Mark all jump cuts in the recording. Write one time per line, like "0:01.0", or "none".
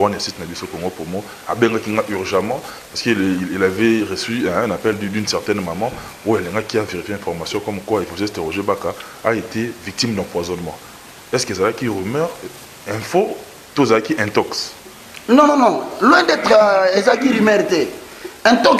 none